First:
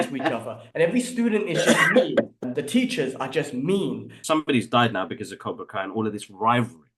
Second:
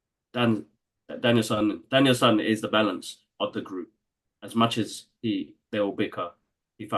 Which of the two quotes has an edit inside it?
first; 2 cuts; at 2.4 s, 4.1 s

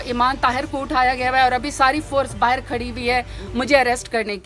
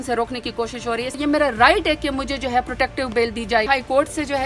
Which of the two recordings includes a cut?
second; 2 cuts; at 1.2 s, 3.7 s

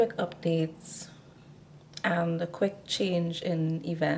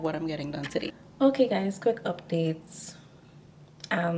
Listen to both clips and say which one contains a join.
second; 1 cut; at 0.9 s

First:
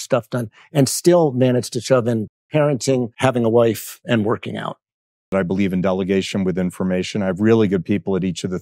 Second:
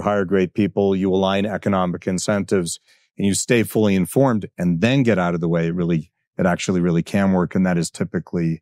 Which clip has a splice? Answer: first; 3 cuts; at 3.1 s, 3.9 s, 5.3 s

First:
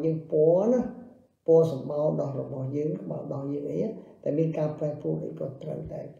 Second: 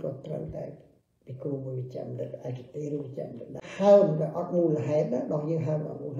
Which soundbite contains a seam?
second; 1 cut; at 3.6 s

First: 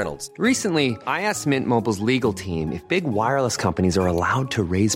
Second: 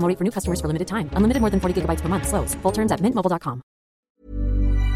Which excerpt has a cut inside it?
second; 1 cut; at 4.1 s

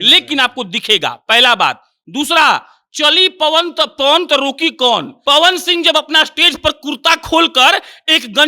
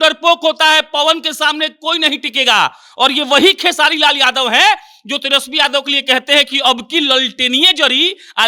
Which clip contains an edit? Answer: first; 1 cut; at 5.1 s

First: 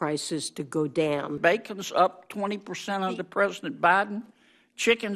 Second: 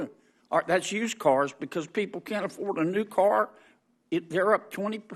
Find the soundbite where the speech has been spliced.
first; 1 cut; at 1.4 s

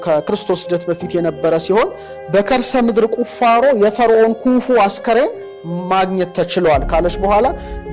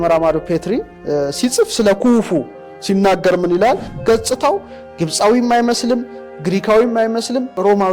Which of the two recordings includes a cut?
second; 1 cut; at 3.9 s

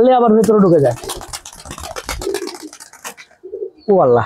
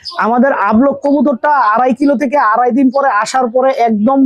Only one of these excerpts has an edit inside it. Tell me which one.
first; 1 cut; at 0.9 s

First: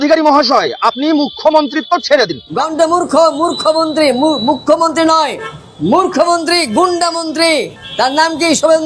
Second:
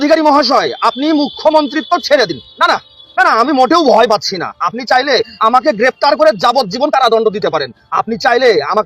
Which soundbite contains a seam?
first; 1 cut; at 2.4 s

